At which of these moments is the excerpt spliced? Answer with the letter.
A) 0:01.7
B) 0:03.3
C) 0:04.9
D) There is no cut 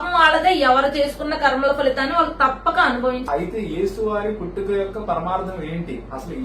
B